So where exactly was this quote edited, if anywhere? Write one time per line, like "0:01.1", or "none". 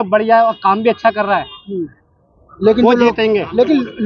none